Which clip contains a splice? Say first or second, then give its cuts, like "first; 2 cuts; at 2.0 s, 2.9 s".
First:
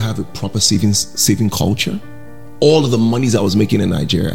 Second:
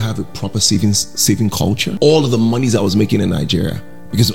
second; 1 cut; at 1.9 s